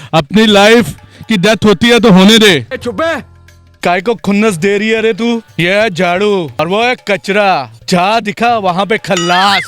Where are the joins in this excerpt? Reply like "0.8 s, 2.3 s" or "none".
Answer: 3.7 s, 5.5 s, 6.5 s, 7.7 s